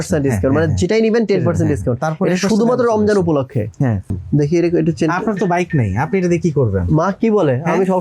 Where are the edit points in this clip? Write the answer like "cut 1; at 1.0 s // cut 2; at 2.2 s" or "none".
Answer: cut 1; at 4.2 s